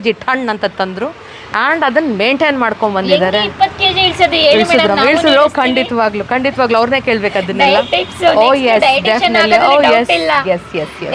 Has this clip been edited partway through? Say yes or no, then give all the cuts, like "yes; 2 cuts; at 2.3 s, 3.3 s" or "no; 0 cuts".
no; 0 cuts